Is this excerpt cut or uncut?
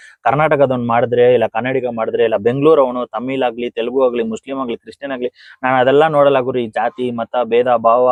uncut